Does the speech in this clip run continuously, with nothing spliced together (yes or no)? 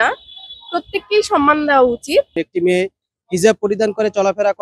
no